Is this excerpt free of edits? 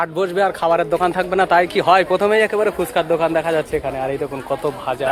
yes; 0 cuts

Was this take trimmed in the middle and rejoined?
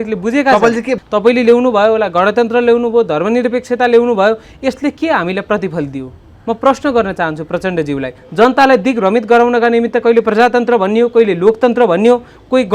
yes; 2 cuts; at 1.0 s, 8.2 s

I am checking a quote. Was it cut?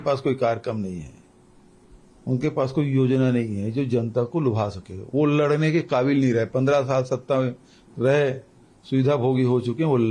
no; 0 cuts

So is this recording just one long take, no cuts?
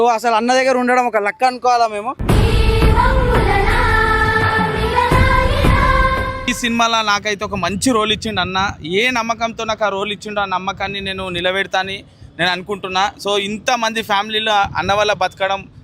yes; 0 cuts

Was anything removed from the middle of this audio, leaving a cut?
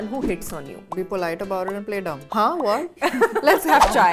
yes; 3 cuts; at 0.9 s, 2.2 s, 2.9 s

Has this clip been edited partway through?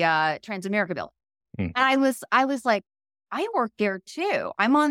no; 0 cuts

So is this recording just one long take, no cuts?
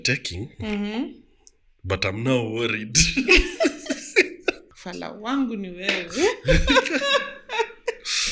no; 1 cut; at 4.6 s

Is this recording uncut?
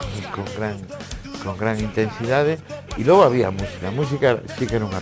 yes; 0 cuts

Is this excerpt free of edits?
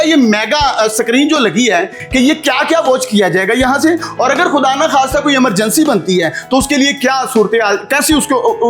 no; 1 cut; at 2.0 s

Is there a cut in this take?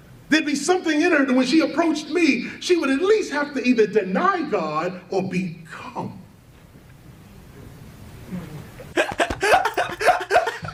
no; 0 cuts

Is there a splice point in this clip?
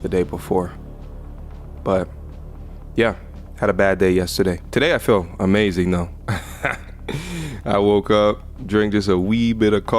yes; 1 cut; at 6.4 s

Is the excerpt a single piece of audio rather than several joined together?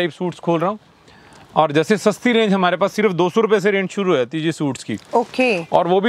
yes; 0 cuts

